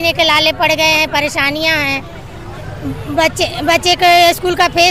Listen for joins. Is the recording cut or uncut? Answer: uncut